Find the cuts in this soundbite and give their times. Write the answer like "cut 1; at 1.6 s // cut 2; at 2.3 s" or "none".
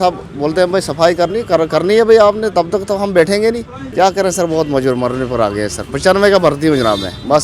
cut 1; at 3.8 s